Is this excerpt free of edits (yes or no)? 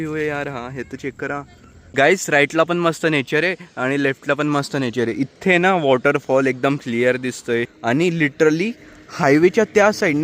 no